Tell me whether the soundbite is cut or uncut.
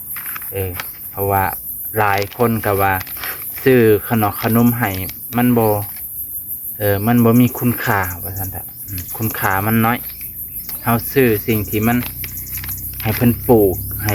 uncut